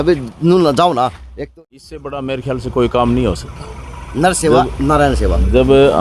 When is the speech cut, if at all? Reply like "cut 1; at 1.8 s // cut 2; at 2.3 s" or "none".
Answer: cut 1; at 1.3 s

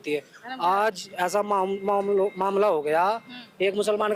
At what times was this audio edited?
none

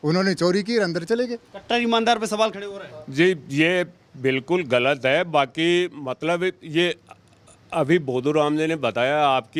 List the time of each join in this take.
none

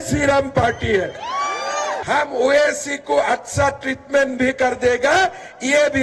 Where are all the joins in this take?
cut 1; at 2.0 s

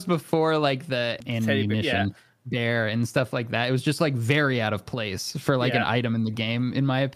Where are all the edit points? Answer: cut 1; at 1.2 s

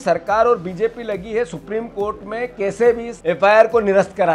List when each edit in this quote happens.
cut 1; at 3.1 s

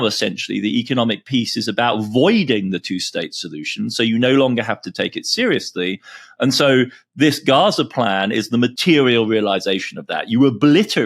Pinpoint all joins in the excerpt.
cut 1; at 8.8 s

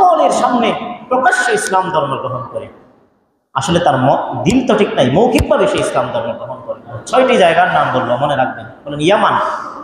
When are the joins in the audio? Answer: cut 1; at 6.9 s

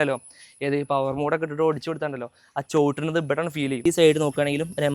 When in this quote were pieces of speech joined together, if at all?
cut 1; at 3.8 s

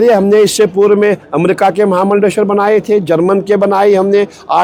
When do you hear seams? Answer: none

